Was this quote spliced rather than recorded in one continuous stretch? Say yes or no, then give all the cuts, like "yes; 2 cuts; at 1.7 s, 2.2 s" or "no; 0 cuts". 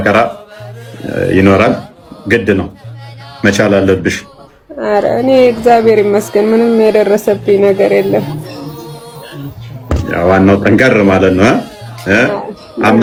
no; 0 cuts